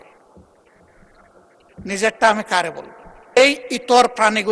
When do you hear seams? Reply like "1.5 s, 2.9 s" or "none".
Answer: 3.4 s

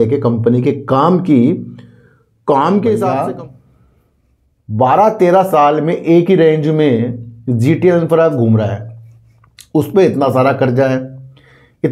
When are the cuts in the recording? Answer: 3.1 s

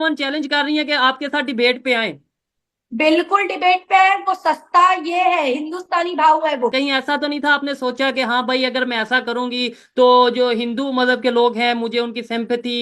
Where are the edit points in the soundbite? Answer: 6.7 s

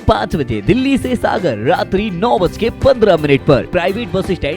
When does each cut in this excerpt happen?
3.7 s

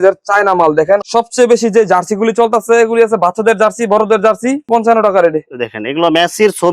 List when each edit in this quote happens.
1.1 s, 4.6 s

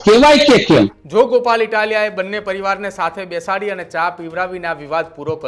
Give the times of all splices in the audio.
0.9 s

